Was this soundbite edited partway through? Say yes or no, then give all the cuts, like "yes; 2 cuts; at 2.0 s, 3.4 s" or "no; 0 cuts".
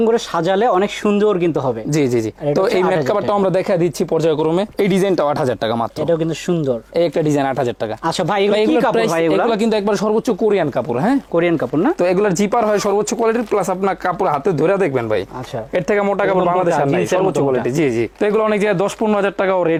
no; 0 cuts